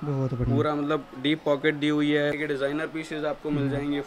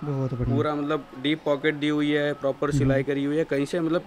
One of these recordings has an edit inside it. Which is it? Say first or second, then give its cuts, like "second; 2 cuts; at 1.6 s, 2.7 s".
first; 1 cut; at 2.4 s